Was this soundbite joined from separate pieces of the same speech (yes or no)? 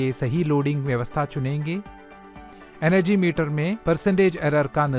yes